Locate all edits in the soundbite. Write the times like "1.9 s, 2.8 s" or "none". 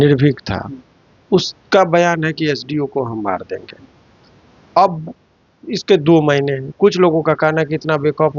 none